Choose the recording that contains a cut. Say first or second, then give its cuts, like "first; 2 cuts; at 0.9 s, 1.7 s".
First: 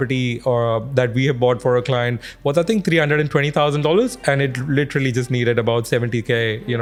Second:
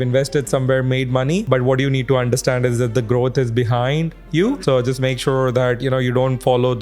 second; 2 cuts; at 1.4 s, 4.6 s